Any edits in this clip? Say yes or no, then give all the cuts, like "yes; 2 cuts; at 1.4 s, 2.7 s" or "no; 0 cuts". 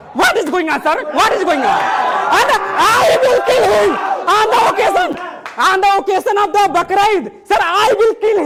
no; 0 cuts